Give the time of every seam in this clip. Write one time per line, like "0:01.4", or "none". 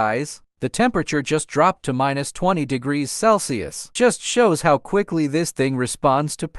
0:03.9